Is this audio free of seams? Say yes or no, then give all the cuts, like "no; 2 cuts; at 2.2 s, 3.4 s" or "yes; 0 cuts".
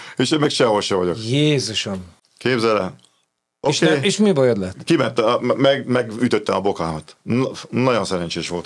yes; 0 cuts